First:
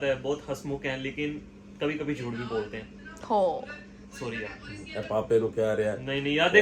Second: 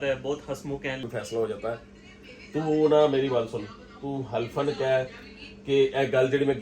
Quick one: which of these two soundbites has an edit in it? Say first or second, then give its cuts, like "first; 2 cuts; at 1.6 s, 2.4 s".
second; 1 cut; at 1.0 s